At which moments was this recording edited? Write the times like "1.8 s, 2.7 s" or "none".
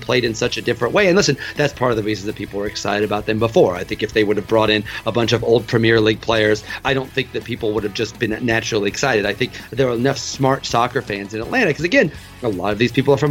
6.8 s